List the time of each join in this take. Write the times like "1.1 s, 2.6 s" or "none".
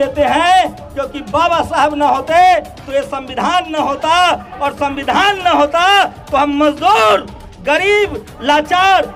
none